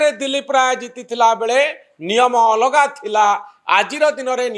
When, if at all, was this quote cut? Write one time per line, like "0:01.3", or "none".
none

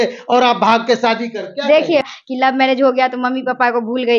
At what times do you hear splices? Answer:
0:02.1

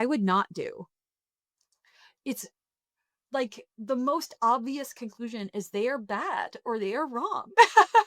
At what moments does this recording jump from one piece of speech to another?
none

